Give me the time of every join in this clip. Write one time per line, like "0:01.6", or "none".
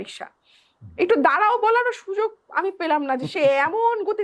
none